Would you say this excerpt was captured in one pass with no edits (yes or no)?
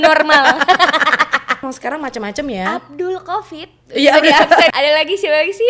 no